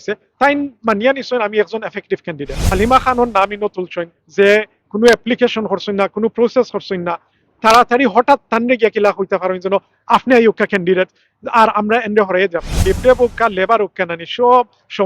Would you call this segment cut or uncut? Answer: cut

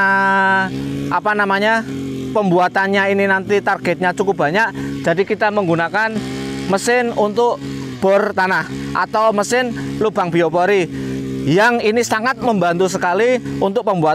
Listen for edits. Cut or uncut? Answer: uncut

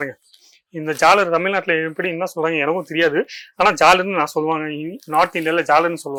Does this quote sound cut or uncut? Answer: uncut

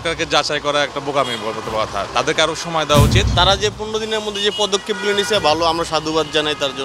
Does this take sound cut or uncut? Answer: cut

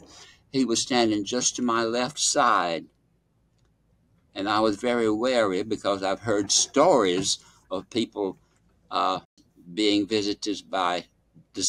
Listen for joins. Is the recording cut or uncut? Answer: uncut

